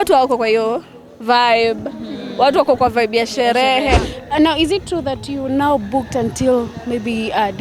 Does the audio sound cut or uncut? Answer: cut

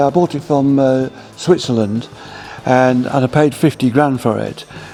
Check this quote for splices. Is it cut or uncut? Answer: uncut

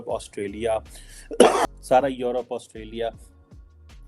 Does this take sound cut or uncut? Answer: cut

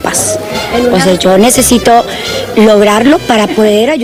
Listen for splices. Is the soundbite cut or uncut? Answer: uncut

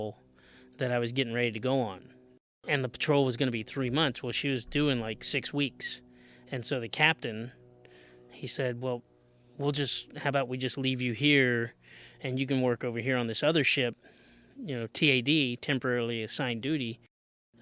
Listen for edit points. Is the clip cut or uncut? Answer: cut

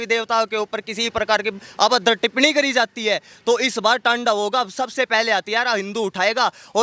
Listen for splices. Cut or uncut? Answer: uncut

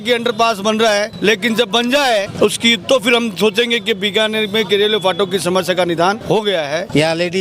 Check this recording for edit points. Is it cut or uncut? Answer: cut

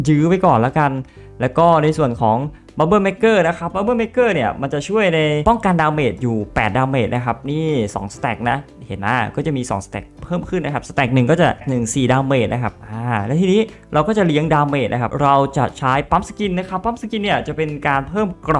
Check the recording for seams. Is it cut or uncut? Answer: cut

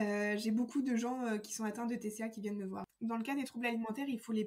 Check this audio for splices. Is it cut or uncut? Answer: cut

